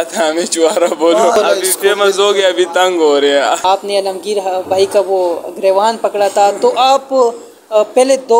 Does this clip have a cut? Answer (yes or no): yes